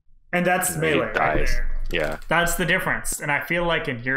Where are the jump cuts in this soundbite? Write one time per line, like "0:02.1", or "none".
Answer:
0:03.1